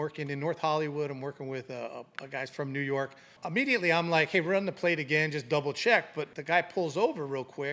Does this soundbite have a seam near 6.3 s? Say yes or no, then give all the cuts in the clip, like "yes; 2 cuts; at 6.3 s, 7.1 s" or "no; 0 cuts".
yes; 2 cuts; at 3.4 s, 6.3 s